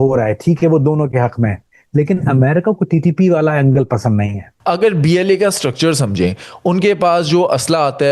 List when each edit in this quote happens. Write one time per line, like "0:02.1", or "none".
0:04.4